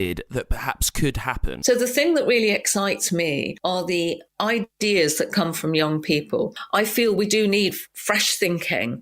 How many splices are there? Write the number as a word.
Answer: two